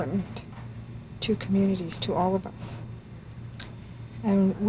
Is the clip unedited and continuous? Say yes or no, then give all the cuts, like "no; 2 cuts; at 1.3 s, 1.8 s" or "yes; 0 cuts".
yes; 0 cuts